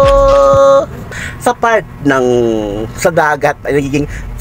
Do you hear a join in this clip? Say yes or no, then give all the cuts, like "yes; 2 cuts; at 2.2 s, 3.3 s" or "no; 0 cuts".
yes; 1 cut; at 1.0 s